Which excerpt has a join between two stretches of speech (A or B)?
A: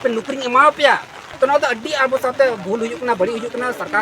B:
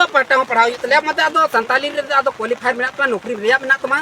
A